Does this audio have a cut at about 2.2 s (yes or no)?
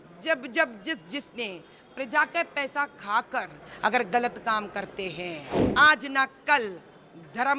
no